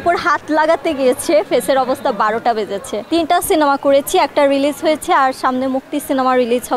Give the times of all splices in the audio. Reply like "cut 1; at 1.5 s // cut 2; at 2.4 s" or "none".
cut 1; at 2.9 s